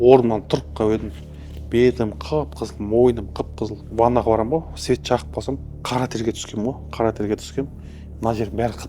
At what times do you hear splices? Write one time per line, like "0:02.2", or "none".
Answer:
0:03.9
0:05.7